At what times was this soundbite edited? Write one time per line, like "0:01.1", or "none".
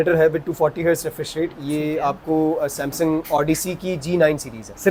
none